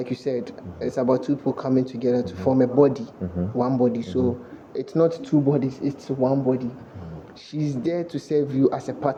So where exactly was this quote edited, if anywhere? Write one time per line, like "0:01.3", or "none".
none